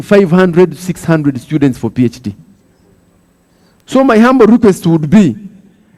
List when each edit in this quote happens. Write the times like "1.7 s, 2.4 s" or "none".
none